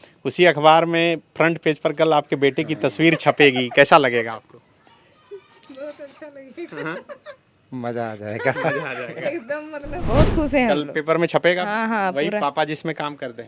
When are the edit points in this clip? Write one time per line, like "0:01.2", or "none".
0:10.0